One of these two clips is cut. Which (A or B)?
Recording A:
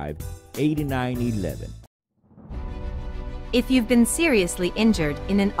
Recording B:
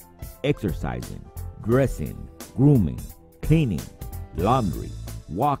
A